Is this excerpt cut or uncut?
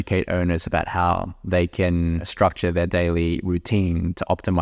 cut